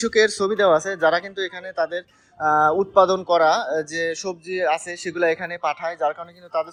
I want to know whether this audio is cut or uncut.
uncut